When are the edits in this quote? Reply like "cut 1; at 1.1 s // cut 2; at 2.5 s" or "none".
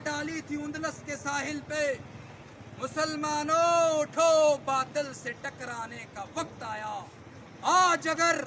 none